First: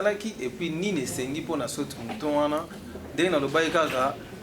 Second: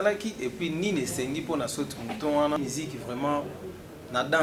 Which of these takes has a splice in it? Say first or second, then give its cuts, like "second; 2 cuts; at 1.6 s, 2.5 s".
second; 1 cut; at 2.6 s